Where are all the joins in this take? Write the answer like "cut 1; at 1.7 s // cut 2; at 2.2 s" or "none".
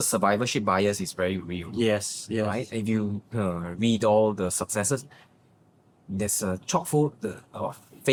none